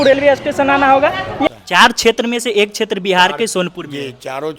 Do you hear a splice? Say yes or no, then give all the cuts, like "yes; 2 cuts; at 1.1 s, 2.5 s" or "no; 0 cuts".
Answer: yes; 1 cut; at 1.5 s